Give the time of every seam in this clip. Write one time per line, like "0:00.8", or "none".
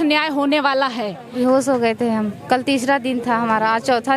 0:01.3